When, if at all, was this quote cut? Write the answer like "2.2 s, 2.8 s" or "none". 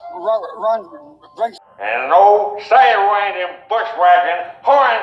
1.5 s